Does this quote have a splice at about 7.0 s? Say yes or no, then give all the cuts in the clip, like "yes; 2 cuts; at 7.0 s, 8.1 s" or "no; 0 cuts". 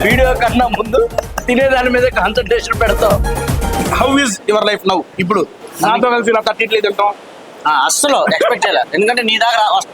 no; 2 cuts; at 3.6 s, 5.6 s